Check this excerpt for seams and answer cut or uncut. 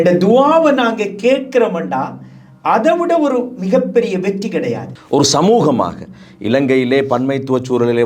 cut